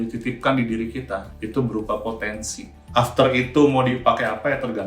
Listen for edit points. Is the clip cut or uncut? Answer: cut